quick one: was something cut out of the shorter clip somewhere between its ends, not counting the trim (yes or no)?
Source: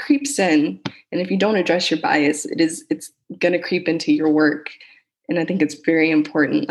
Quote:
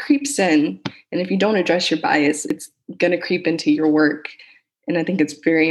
yes